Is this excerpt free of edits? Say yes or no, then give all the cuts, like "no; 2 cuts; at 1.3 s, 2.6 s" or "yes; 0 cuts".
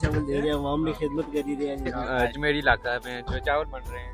no; 1 cut; at 2.0 s